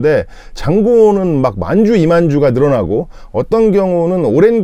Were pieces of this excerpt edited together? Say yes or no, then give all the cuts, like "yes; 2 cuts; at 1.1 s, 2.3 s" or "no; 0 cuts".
no; 0 cuts